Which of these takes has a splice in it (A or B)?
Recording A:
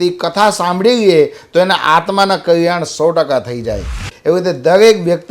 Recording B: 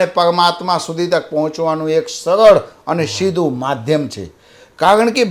A